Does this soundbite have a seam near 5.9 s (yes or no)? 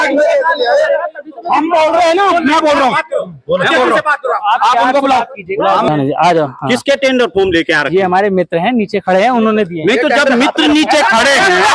yes